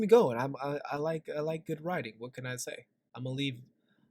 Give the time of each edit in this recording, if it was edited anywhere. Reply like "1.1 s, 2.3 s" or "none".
3.0 s